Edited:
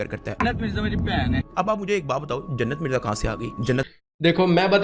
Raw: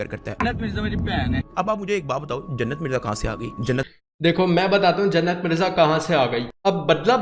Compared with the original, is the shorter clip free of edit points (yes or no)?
yes